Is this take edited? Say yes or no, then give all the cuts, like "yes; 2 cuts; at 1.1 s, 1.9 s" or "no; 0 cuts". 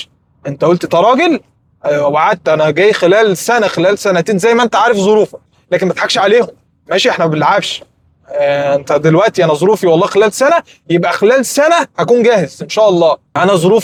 no; 0 cuts